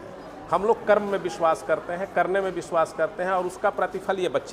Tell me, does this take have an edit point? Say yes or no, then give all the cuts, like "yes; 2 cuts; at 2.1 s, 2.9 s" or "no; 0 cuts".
no; 0 cuts